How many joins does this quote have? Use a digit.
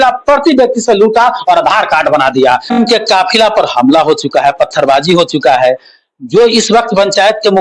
1